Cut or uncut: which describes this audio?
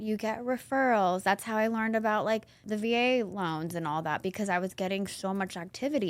cut